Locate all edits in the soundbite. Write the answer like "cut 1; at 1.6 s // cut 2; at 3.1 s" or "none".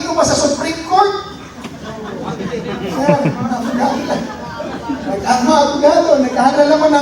none